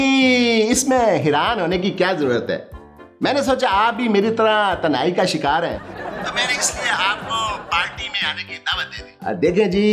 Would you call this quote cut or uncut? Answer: uncut